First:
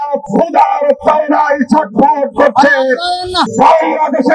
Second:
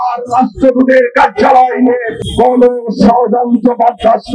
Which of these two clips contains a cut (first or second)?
first